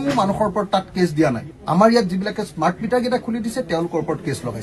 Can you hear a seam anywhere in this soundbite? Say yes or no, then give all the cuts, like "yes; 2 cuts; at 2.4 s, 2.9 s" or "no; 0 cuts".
no; 0 cuts